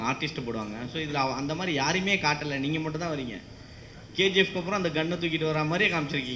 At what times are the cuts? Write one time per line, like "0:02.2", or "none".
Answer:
none

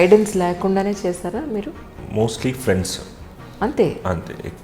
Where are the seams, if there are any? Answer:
0:01.8

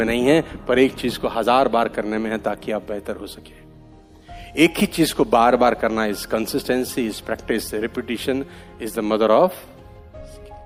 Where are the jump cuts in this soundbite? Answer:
none

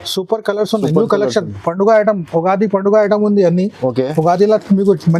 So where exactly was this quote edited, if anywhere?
none

